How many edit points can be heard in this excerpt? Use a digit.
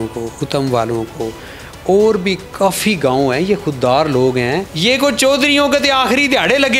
1